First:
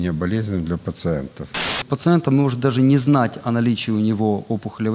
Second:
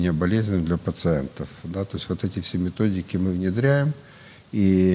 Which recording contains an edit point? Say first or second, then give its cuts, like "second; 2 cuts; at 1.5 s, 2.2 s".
first; 1 cut; at 1.8 s